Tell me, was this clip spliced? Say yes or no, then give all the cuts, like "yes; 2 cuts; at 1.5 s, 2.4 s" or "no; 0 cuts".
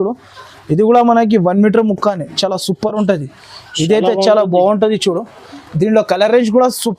no; 0 cuts